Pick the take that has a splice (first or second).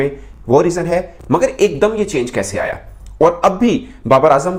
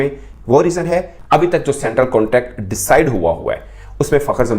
second